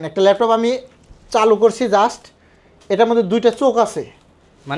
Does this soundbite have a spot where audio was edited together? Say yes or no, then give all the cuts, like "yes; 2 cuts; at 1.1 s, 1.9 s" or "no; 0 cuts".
no; 0 cuts